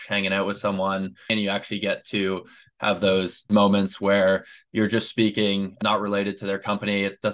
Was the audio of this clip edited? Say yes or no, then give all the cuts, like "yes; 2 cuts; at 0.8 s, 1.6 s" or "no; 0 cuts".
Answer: yes; 3 cuts; at 1.3 s, 3.5 s, 5.7 s